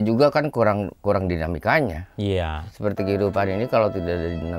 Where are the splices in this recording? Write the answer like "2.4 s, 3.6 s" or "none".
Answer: none